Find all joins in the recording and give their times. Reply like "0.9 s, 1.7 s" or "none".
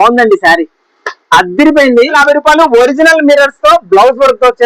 2.1 s